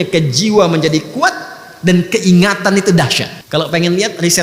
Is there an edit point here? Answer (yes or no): yes